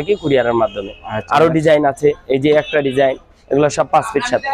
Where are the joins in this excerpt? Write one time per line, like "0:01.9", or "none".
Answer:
none